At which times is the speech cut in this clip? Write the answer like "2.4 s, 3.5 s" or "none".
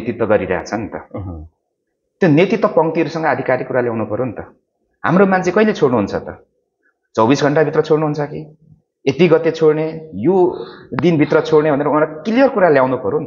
none